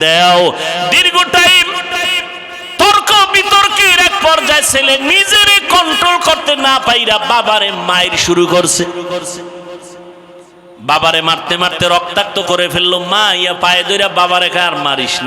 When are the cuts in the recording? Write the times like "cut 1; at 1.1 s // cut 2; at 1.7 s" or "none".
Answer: cut 1; at 10.4 s